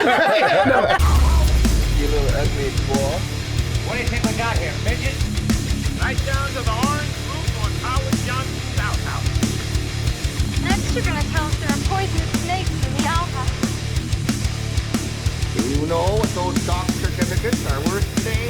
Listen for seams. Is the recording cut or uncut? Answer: cut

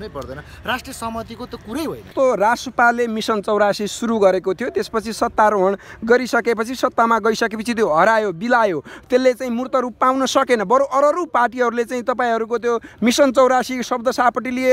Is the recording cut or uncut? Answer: cut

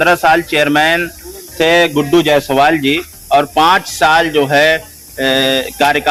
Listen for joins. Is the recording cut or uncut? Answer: uncut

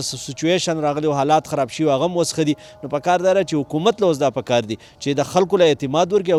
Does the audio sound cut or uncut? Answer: uncut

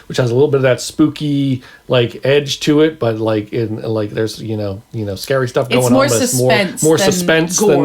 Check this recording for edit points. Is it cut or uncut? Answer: uncut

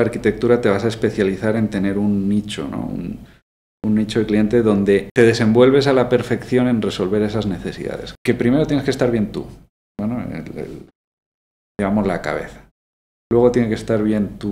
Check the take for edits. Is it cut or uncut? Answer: cut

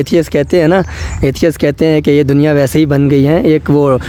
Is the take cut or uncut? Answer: uncut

